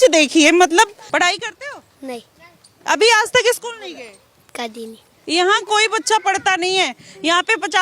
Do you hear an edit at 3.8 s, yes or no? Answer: no